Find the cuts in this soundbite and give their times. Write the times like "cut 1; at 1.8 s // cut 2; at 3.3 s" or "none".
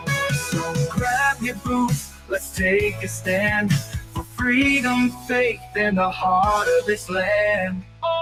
none